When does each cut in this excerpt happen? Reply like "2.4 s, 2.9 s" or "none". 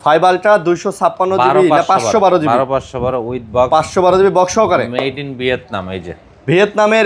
none

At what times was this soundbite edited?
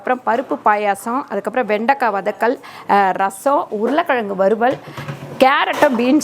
none

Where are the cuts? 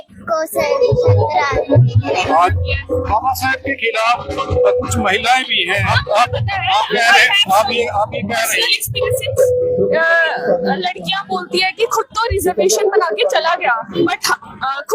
2.5 s, 6.0 s

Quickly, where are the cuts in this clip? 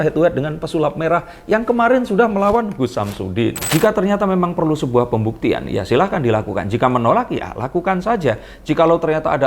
3.7 s

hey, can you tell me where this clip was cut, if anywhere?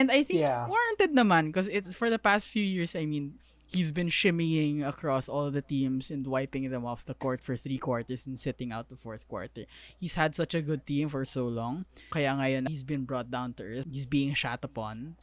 12.0 s, 12.7 s, 13.9 s

